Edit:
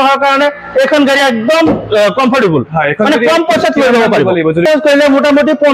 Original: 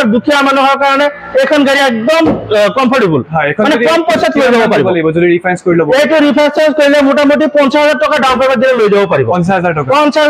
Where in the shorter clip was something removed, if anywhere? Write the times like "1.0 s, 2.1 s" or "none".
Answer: 4.6 s